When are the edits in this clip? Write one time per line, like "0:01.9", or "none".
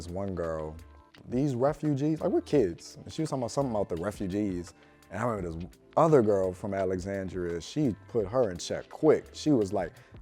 0:01.2